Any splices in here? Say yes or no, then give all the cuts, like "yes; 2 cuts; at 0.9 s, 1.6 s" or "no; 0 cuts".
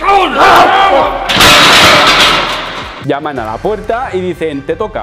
yes; 1 cut; at 2.9 s